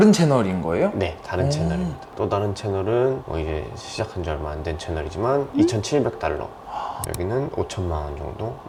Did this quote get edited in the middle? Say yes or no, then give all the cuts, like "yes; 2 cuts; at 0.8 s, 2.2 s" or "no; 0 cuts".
no; 0 cuts